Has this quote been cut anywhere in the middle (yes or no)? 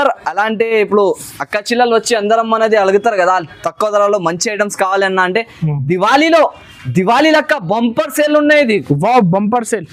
no